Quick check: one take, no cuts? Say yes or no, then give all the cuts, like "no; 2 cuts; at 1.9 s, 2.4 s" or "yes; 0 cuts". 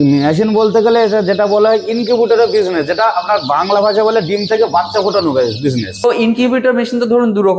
no; 1 cut; at 6.0 s